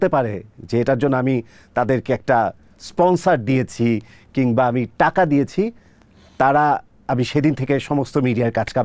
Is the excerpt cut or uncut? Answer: uncut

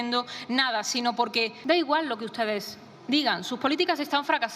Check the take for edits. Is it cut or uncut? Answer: cut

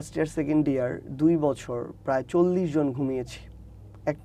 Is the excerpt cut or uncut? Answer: uncut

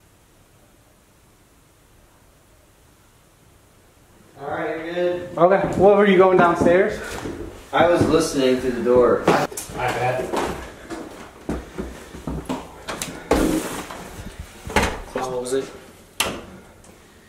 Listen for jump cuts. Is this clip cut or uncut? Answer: uncut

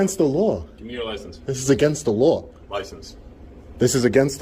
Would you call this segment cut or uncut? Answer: uncut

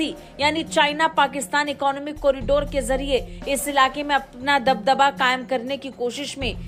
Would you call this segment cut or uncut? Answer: uncut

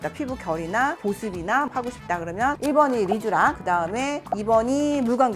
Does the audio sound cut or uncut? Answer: uncut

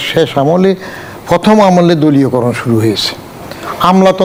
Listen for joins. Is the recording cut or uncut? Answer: uncut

